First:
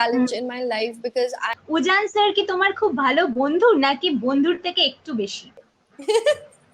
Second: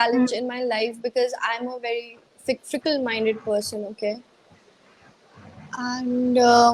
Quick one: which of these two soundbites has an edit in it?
first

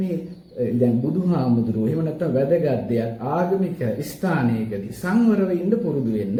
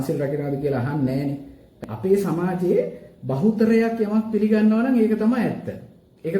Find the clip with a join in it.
second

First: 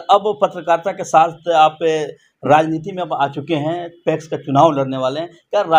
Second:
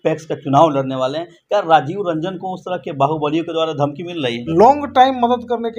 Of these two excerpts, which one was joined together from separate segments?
second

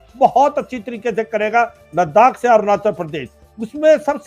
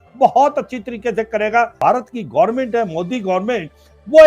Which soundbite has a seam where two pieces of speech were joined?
second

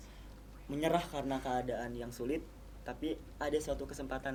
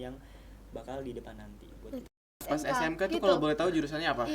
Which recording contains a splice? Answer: second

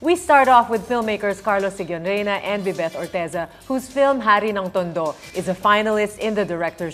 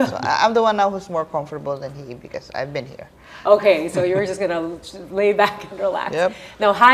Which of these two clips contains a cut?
second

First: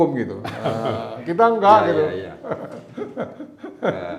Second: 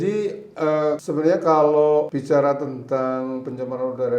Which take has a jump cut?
second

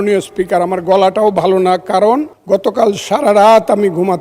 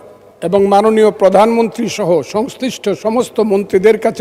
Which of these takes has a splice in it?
first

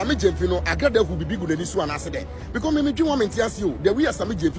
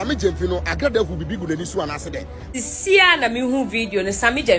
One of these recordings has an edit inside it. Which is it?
second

